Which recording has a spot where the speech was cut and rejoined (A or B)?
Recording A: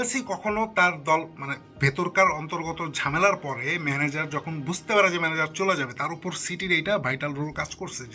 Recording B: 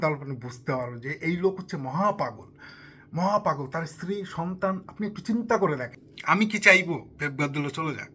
B